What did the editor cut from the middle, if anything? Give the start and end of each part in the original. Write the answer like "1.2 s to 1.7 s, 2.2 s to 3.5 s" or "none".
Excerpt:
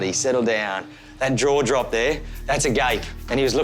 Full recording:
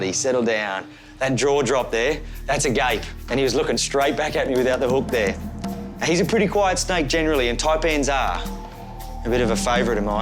none